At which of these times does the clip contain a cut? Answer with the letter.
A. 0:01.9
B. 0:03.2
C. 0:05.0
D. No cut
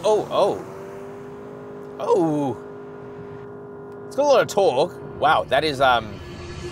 C